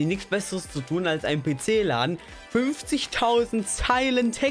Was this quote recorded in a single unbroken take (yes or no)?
yes